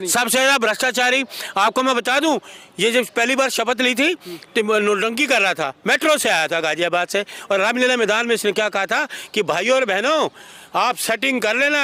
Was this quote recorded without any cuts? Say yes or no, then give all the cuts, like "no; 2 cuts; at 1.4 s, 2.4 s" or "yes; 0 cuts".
yes; 0 cuts